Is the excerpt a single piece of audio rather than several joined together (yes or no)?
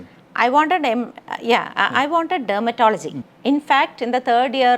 no